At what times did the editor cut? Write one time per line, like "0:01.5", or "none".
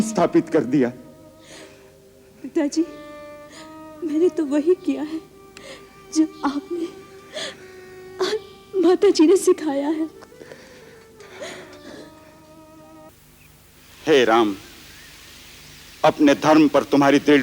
0:13.1

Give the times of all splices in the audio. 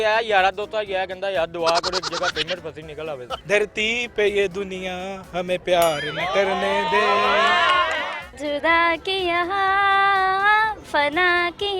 0:03.3
0:08.1

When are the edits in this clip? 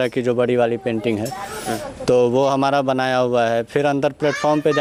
none

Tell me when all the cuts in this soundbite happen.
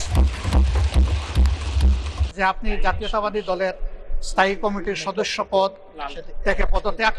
0:02.2

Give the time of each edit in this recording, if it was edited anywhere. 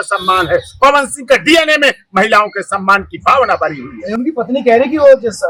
none

